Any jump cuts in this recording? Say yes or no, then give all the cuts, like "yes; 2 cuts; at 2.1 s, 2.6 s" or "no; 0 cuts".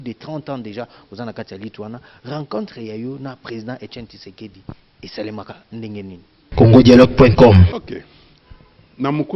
yes; 2 cuts; at 6.3 s, 7.7 s